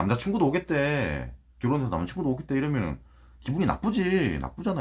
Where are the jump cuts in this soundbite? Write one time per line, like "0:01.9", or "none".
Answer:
none